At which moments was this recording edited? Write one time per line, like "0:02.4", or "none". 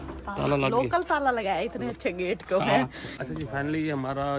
0:03.1